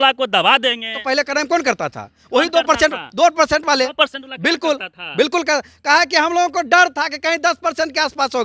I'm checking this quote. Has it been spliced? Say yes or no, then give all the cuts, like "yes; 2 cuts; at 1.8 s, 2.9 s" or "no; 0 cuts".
yes; 1 cut; at 0.9 s